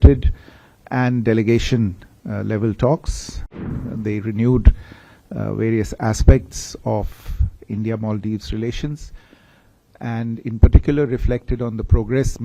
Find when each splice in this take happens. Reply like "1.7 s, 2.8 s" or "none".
3.7 s